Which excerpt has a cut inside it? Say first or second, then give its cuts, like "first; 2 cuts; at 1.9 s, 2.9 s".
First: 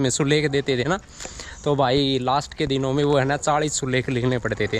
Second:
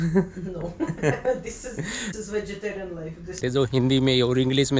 second; 1 cut; at 3.4 s